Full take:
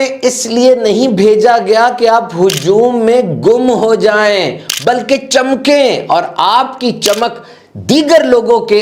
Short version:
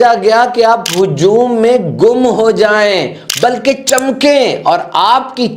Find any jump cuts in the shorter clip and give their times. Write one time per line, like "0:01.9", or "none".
none